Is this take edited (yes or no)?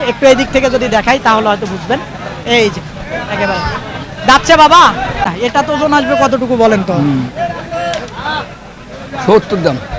yes